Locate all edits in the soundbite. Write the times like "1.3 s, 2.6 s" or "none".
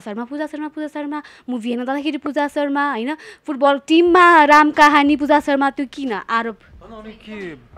none